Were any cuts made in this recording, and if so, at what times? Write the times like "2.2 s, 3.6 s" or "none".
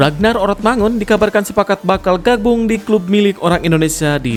none